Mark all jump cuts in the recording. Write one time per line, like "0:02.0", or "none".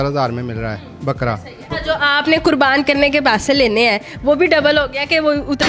none